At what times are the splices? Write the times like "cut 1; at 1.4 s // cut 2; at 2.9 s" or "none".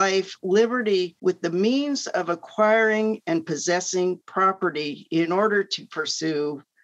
cut 1; at 1.1 s